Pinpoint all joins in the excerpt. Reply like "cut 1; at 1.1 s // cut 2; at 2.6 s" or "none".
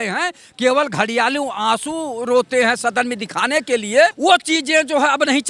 cut 1; at 4.2 s